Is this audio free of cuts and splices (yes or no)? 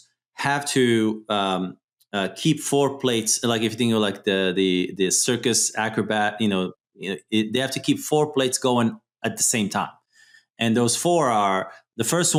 yes